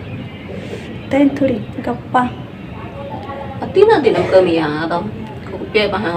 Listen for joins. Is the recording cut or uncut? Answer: uncut